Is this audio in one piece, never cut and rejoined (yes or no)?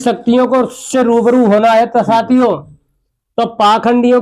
yes